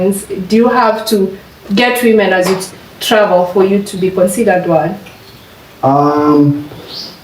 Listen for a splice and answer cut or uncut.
uncut